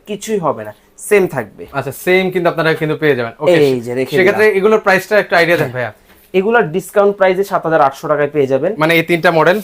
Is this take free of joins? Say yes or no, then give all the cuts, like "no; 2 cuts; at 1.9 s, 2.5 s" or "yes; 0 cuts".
yes; 0 cuts